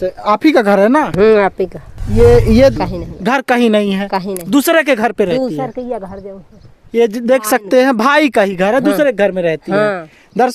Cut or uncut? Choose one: cut